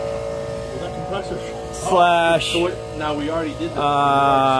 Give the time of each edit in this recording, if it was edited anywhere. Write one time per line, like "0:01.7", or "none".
none